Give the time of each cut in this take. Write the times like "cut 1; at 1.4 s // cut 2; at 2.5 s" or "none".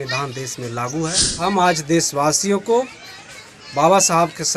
cut 1; at 1.3 s

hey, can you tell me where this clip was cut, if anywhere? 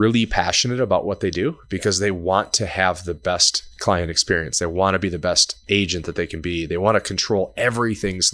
none

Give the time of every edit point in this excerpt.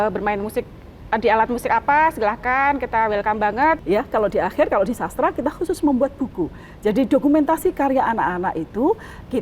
cut 1; at 3.8 s

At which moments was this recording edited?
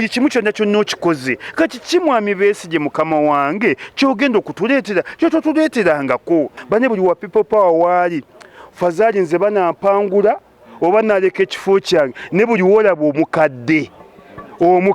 cut 1; at 6.6 s

